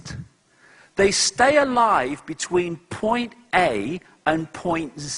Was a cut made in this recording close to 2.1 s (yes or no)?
no